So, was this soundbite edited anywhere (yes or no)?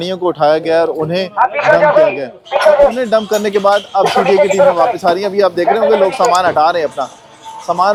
no